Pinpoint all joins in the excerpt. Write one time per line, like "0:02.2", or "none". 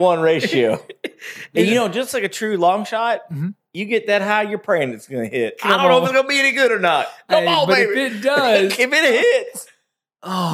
0:01.5